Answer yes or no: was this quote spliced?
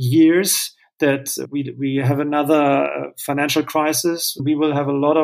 yes